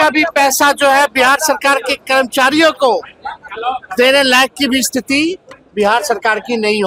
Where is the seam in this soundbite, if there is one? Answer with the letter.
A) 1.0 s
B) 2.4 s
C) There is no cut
C